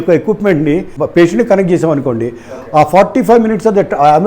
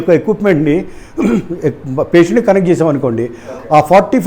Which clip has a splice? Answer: first; 1 cut; at 1.0 s

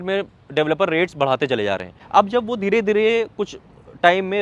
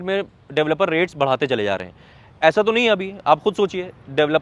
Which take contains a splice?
first; 1 cut; at 1.9 s

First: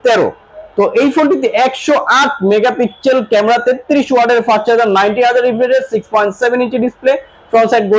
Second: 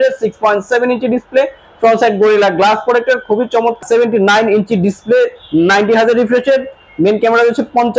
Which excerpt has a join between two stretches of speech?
second; 1 cut; at 3.8 s

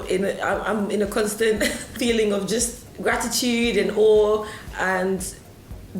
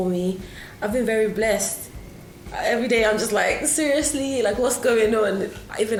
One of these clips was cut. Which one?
first; 1 cut; at 1.9 s

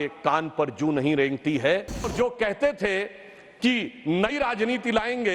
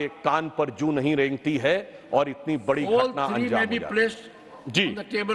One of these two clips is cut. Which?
first; 1 cut; at 2.1 s

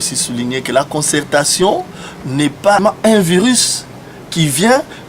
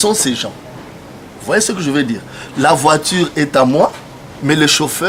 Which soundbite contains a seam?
first; 1 cut; at 2.8 s

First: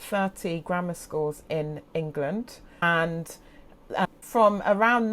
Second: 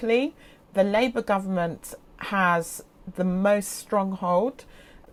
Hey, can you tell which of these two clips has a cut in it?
first; 2 cuts; at 2.8 s, 4.2 s

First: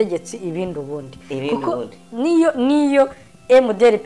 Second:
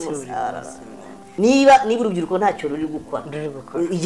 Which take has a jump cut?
second; 1 cut; at 1.2 s

